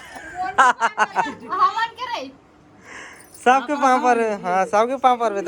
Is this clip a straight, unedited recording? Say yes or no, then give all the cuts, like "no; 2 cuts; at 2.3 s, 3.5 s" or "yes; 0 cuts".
yes; 0 cuts